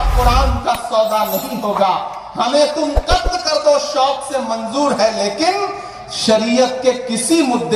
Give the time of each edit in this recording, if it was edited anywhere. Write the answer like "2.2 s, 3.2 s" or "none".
none